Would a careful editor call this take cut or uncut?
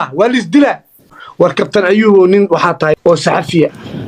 cut